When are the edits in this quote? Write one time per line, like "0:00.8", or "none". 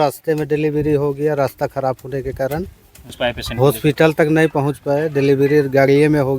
0:03.1